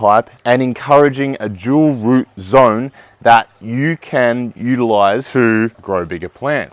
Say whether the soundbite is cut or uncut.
cut